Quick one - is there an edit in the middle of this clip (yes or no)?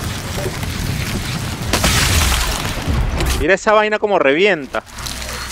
no